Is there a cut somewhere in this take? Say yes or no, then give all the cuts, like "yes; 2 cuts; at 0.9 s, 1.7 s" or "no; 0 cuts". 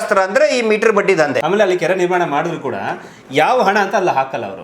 yes; 1 cut; at 1.4 s